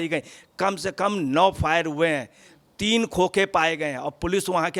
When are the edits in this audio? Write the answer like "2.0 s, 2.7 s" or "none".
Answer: none